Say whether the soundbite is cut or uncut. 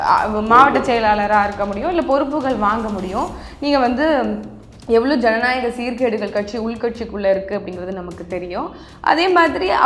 uncut